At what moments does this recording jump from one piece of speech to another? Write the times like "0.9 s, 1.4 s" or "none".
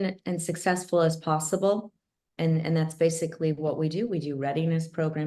none